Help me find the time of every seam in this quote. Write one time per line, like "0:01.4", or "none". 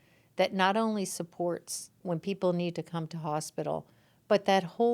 0:02.0